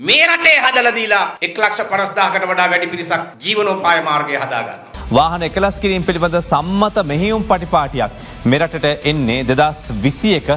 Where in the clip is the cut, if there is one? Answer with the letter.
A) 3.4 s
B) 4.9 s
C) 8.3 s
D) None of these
B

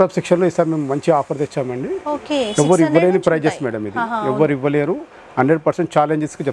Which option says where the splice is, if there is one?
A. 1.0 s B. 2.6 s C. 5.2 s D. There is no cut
D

